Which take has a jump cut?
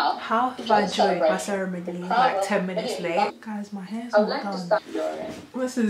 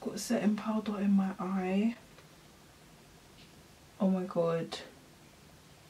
first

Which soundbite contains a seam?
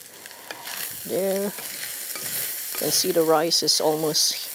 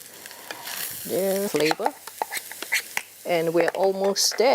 second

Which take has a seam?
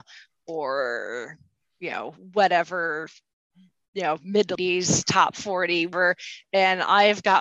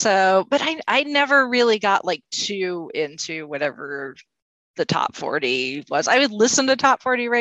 first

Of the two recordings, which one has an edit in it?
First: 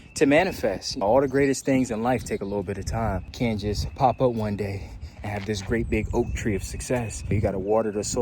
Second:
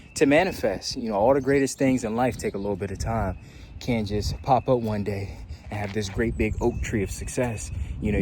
first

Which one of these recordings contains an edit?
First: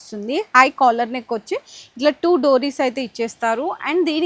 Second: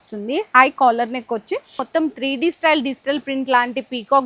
second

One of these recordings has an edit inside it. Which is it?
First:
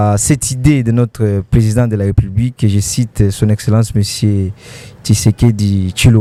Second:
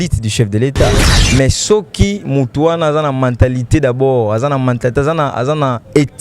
second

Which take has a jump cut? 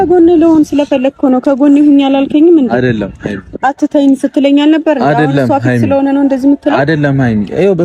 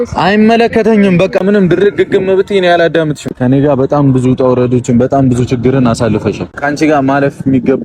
second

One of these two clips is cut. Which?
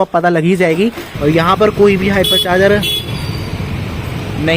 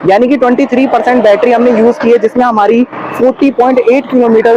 first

